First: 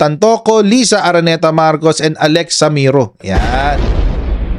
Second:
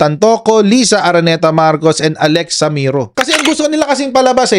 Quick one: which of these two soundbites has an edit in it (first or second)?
second